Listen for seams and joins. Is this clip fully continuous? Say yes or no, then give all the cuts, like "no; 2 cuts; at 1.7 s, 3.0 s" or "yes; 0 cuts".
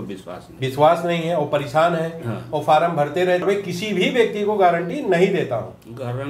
no; 1 cut; at 3.4 s